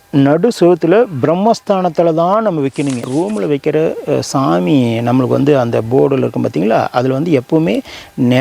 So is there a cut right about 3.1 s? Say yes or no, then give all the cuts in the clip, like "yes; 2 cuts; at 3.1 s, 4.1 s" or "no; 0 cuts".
yes; 1 cut; at 3.1 s